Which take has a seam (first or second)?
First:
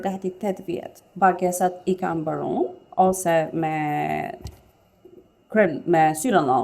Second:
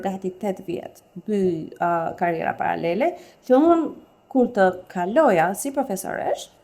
first